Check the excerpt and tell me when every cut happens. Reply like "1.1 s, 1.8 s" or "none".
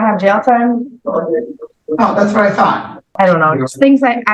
3.1 s